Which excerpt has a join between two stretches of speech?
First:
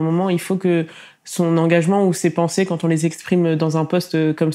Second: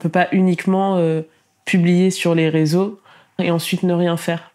second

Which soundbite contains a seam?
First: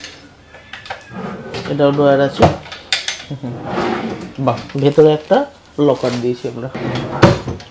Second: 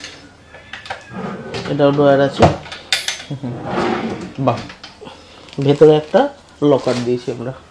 first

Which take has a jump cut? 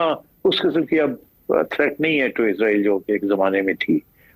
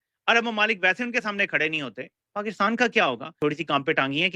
second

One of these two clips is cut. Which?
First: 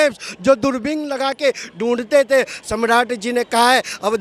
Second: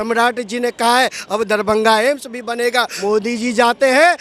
second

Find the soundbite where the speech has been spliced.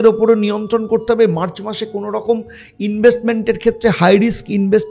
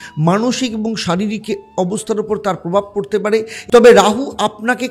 second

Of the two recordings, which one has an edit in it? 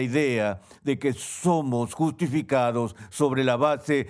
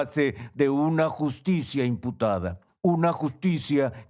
second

